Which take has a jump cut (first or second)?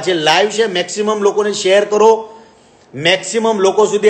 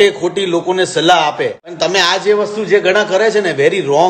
second